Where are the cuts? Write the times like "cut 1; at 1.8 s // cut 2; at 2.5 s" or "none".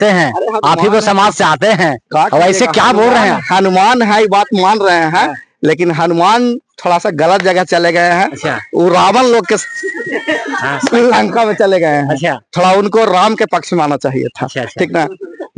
none